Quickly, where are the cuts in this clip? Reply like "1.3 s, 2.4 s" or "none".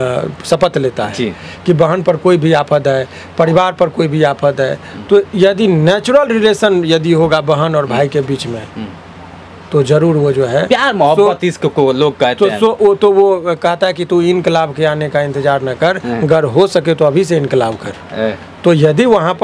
none